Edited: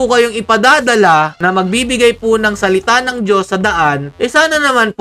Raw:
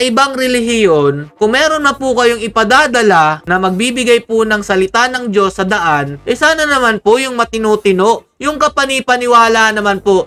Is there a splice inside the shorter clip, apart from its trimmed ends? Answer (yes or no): no